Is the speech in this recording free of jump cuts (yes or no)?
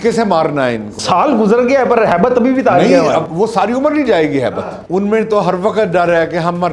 no